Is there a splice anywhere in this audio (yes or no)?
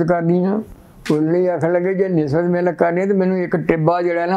no